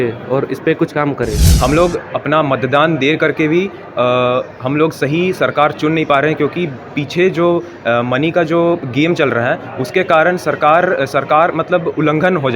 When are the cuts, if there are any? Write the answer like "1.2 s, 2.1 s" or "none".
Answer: 1.4 s